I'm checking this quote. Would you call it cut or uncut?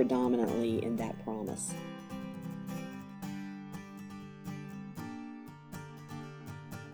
uncut